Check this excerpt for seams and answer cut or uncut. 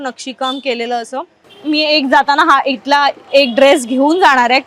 cut